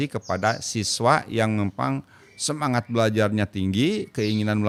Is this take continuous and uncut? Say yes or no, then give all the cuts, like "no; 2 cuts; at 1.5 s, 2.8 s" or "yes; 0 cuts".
yes; 0 cuts